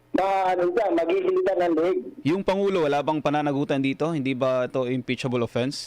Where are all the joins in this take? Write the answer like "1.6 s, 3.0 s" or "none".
1.4 s